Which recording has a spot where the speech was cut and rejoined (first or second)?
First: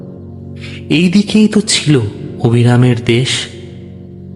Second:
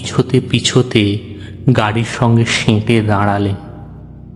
first